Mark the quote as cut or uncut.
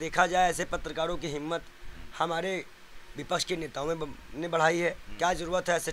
uncut